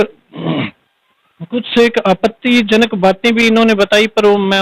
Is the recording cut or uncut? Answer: uncut